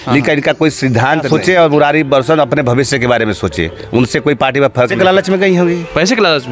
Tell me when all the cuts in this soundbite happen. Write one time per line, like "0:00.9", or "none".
0:01.3
0:04.9